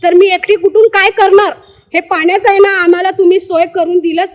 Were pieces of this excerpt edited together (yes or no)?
no